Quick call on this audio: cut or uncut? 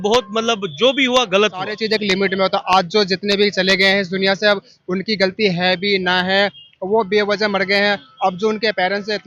cut